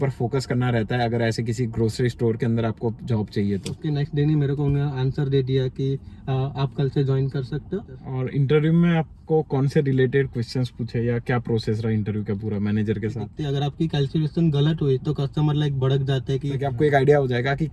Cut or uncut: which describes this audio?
cut